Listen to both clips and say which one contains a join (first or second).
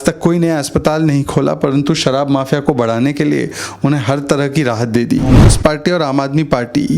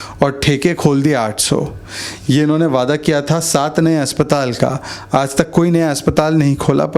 first